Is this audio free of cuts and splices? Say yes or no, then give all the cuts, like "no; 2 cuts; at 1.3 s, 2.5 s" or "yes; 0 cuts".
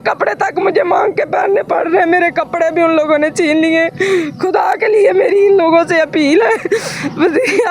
yes; 0 cuts